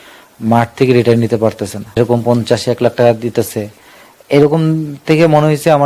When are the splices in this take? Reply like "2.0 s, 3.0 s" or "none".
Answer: 2.0 s